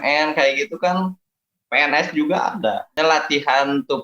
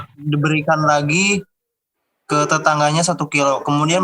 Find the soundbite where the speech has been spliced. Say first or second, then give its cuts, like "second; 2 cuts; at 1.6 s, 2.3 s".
first; 1 cut; at 3.0 s